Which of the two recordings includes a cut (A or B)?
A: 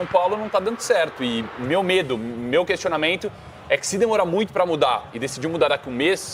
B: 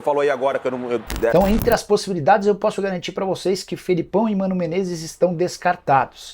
B